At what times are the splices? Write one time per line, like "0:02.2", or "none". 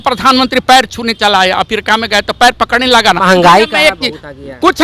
0:03.2